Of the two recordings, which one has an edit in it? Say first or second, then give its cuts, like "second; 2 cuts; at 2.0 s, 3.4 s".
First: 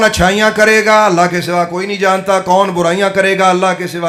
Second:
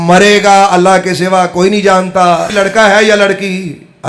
second; 1 cut; at 2.5 s